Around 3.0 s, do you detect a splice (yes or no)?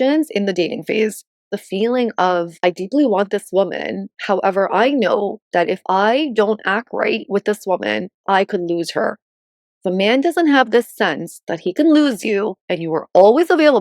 no